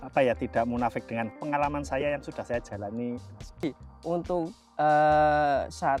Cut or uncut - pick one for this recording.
cut